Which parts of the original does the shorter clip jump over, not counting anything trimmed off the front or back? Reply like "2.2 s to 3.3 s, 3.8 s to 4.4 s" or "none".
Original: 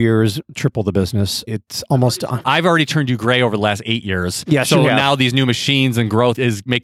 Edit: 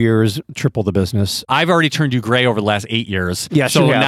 1.4 s to 2.4 s